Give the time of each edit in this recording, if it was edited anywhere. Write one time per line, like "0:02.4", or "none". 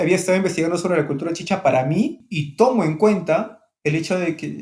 0:02.2